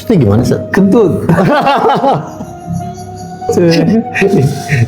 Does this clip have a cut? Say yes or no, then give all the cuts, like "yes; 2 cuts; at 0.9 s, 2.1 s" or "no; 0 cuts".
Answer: yes; 1 cut; at 3.5 s